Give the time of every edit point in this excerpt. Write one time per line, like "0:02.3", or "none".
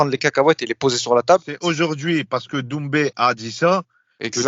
0:01.5